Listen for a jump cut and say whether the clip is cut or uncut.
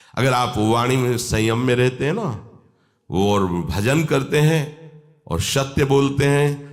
uncut